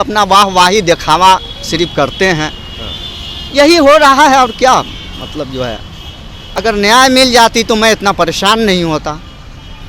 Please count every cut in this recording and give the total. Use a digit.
1